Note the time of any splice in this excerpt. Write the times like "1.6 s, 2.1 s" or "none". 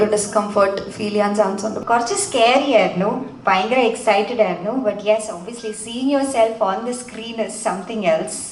1.8 s